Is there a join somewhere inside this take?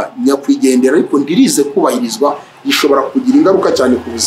no; 0 cuts

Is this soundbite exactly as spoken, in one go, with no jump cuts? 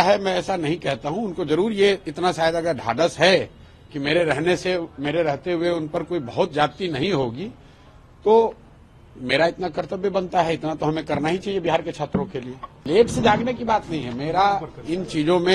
no; 1 cut; at 12.8 s

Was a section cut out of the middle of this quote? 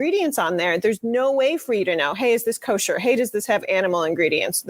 no; 0 cuts

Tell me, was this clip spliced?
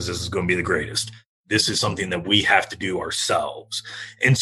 no; 0 cuts

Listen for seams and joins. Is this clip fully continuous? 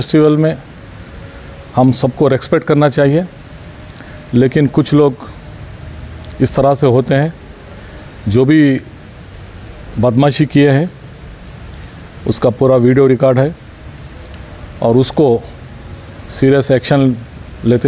yes; 0 cuts

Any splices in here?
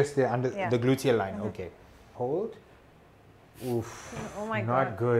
yes; 1 cut; at 2.0 s

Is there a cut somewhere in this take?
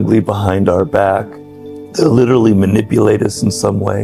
no; 0 cuts

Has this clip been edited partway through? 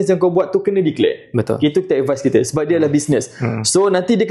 no; 0 cuts

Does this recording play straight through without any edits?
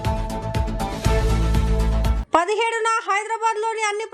yes; 0 cuts

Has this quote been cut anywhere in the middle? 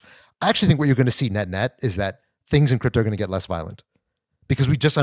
no; 0 cuts

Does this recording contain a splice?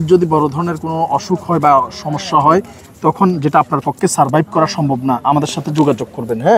no; 0 cuts

